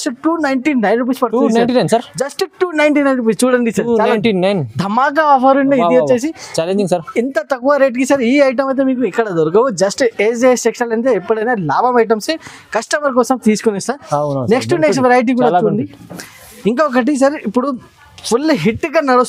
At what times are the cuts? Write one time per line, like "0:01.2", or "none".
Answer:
none